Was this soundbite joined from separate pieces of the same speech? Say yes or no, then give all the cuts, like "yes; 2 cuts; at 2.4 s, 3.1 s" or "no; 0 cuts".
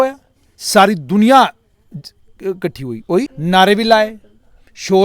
yes; 1 cut; at 3.3 s